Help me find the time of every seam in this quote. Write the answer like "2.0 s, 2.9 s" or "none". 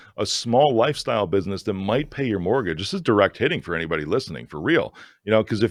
none